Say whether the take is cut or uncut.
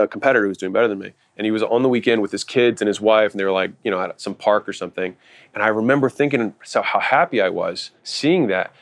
uncut